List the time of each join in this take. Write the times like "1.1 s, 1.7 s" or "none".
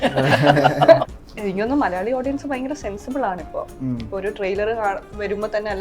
1.2 s